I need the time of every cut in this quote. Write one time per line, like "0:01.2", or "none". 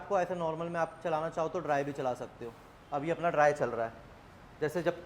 none